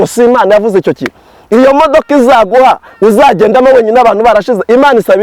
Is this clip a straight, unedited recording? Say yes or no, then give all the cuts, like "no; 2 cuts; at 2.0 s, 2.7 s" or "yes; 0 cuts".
yes; 0 cuts